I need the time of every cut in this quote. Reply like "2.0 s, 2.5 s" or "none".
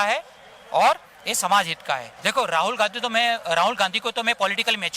2.1 s

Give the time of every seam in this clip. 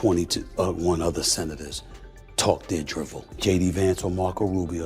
3.2 s

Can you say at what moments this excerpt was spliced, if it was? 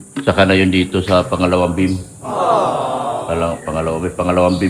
2.0 s, 3.2 s

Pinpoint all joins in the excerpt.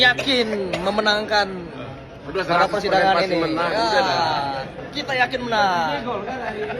none

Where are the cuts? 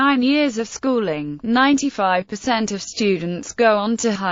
1.7 s

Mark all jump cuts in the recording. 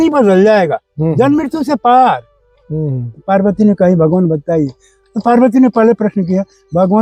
none

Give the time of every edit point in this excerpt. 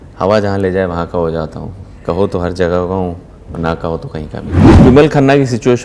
4.7 s

